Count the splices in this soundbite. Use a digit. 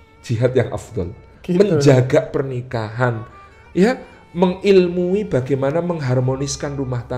0